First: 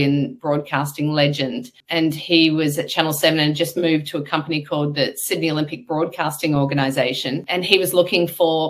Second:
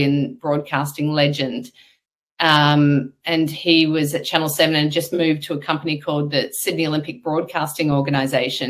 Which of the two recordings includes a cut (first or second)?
first